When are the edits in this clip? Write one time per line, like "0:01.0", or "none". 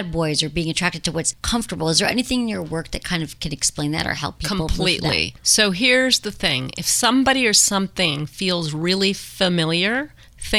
0:01.4
0:05.4